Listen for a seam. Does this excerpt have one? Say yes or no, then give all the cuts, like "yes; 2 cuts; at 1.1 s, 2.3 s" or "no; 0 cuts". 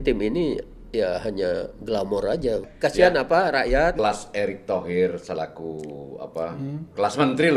yes; 2 cuts; at 2.7 s, 4.0 s